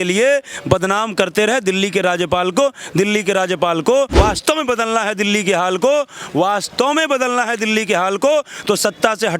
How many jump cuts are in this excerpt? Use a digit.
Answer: 1